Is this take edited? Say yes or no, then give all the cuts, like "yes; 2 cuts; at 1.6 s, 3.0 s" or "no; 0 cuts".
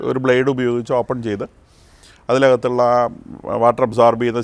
no; 0 cuts